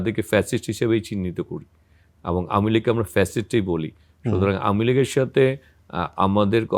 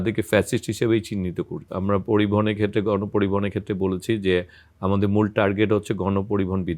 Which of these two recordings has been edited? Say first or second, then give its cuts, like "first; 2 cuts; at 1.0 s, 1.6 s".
second; 1 cut; at 1.7 s